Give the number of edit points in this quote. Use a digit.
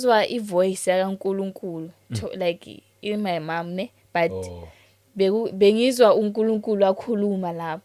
0